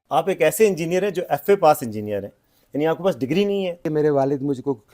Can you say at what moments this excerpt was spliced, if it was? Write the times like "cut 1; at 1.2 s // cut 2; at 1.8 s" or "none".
cut 1; at 3.8 s